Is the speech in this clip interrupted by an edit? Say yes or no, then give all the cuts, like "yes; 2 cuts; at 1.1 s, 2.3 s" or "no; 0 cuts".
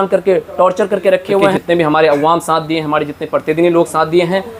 yes; 1 cut; at 1.6 s